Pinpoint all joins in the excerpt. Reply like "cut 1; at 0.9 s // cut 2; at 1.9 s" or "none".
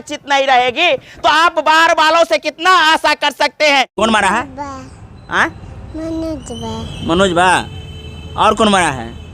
cut 1; at 3.9 s